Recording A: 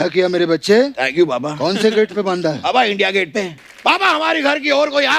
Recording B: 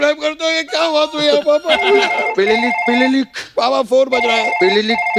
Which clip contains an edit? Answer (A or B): A